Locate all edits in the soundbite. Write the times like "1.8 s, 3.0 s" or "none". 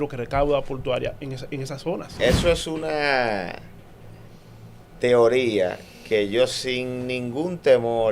2.1 s